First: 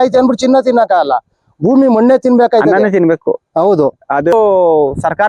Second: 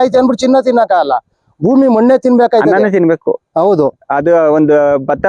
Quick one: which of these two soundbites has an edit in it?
first; 1 cut; at 4.3 s

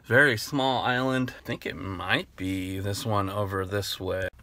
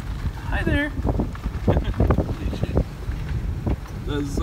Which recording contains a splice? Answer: first; 1 cut; at 1.4 s

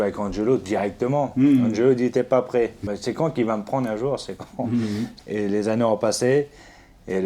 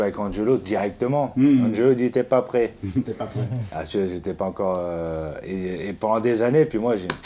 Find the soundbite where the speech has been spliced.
first; 2 cuts; at 2.9 s, 5.2 s

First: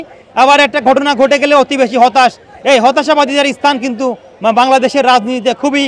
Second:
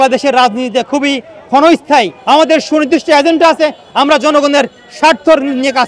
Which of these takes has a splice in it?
second; 1 cut; at 2.2 s

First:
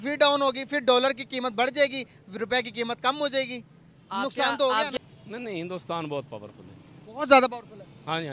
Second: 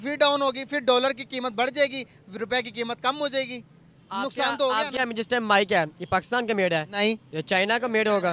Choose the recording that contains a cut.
first; 1 cut; at 4.9 s

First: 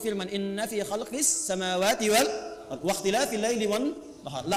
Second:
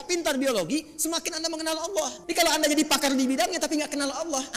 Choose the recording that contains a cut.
second; 1 cut; at 2.2 s

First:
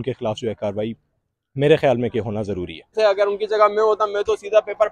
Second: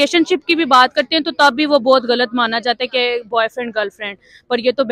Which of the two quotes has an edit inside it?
first; 1 cut; at 2.9 s

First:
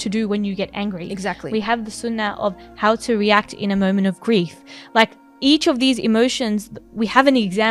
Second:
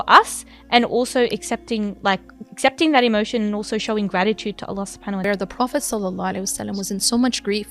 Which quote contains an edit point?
second; 1 cut; at 5.2 s

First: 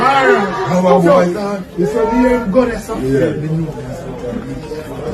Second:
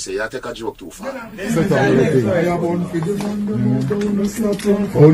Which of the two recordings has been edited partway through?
second; 1 cut; at 1.3 s

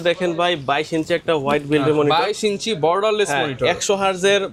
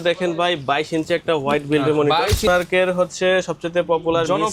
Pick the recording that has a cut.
second; 1 cut; at 2.5 s

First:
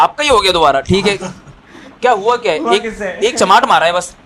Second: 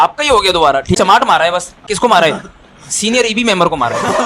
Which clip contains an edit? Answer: second; 2 cuts; at 1.0 s, 1.8 s

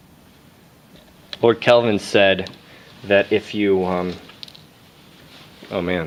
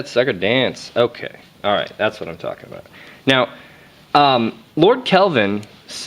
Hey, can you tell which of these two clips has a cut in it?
second; 1 cut; at 5.2 s

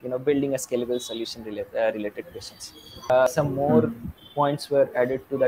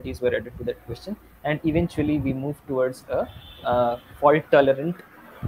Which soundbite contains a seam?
first; 1 cut; at 3.1 s

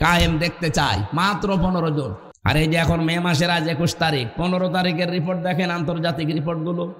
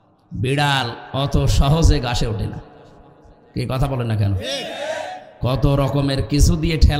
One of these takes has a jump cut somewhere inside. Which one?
first; 1 cut; at 2.2 s

